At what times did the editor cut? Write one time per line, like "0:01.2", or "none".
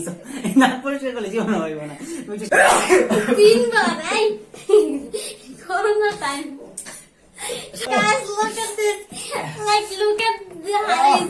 0:02.4
0:07.9